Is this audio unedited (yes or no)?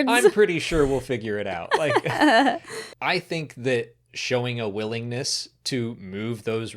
no